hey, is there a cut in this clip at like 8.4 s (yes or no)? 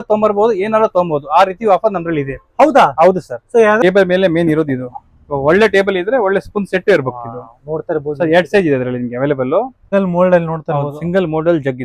no